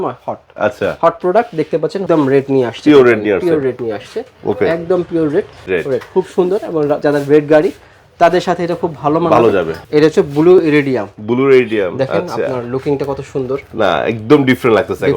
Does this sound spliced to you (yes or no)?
yes